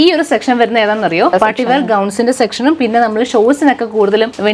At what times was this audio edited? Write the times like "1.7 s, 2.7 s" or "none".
1.3 s